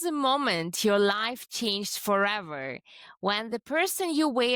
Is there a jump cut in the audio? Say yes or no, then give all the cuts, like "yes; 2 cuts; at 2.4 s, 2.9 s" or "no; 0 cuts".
no; 0 cuts